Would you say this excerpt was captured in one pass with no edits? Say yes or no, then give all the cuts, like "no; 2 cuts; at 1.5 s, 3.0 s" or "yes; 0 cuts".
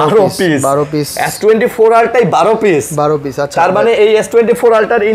yes; 0 cuts